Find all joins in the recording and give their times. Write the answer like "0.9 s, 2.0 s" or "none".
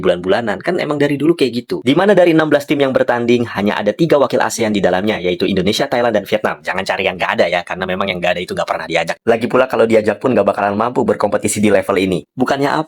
1.8 s